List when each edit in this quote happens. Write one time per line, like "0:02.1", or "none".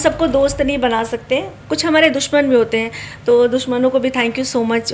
none

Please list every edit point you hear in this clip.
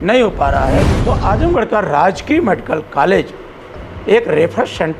0:01.0

